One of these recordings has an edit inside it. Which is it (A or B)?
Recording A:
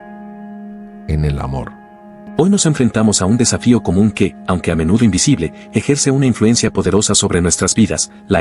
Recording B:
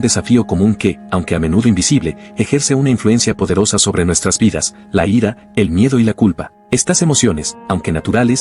A